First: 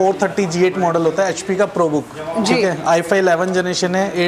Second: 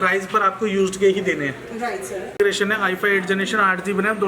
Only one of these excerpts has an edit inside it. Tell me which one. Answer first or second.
second